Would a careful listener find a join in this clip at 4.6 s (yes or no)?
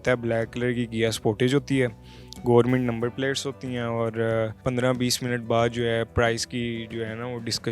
yes